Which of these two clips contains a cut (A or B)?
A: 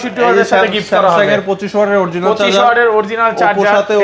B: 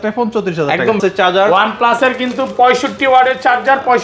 B